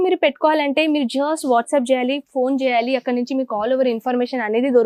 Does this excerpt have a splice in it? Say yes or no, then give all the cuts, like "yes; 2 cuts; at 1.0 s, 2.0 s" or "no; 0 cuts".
no; 0 cuts